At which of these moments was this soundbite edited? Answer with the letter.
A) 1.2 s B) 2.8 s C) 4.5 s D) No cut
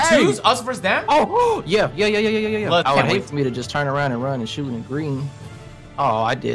B